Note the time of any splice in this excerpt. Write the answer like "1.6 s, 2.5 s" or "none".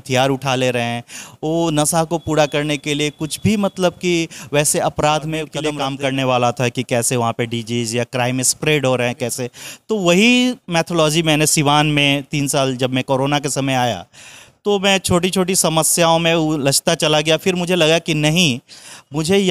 5.6 s